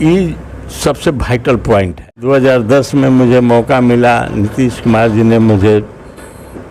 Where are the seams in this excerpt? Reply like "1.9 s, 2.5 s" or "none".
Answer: 2.1 s